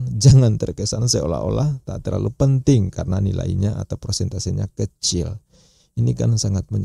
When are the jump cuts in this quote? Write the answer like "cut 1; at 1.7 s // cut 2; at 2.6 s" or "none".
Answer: none